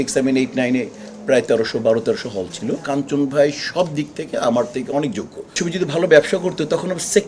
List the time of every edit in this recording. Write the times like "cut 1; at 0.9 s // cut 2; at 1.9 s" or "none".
cut 1; at 2.8 s // cut 2; at 5.6 s